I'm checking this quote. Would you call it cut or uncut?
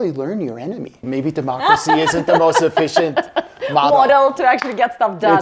cut